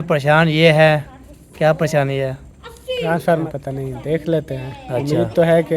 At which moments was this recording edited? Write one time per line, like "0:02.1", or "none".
0:03.4